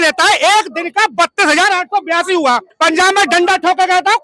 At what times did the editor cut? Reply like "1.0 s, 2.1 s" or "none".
2.7 s